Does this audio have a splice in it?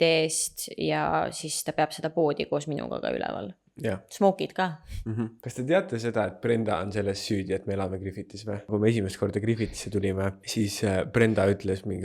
yes; 3 cuts; at 5.4 s, 8.7 s, 10.4 s

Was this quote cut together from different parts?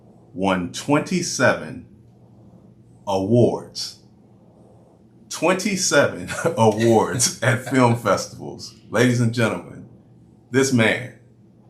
no; 0 cuts

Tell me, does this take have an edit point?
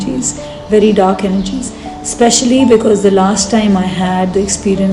no; 0 cuts

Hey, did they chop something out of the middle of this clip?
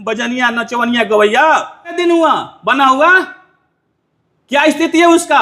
yes; 1 cut; at 2.0 s

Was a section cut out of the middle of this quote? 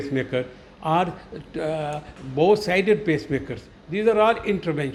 no; 0 cuts

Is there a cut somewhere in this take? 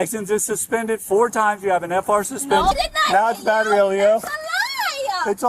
yes; 1 cut; at 2.7 s

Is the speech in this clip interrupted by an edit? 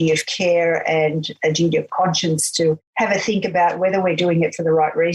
no; 0 cuts

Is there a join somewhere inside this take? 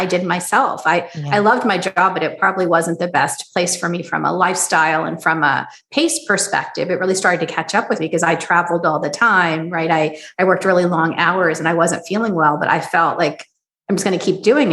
no; 0 cuts

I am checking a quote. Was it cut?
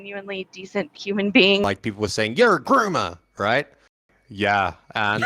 yes; 2 cuts; at 1.6 s, 4.1 s

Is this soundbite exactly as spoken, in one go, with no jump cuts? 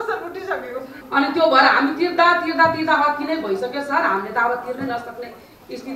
no; 1 cut; at 1.0 s

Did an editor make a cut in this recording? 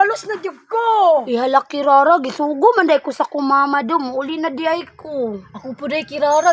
yes; 1 cut; at 1.3 s

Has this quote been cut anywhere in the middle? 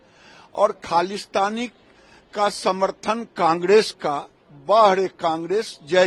no; 0 cuts

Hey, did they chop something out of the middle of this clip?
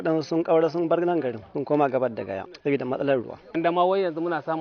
yes; 3 cuts; at 1.4 s, 2.5 s, 3.5 s

